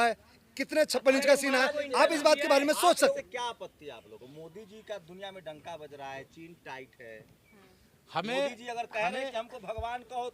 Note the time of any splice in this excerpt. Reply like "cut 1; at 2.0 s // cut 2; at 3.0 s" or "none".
cut 1; at 3.1 s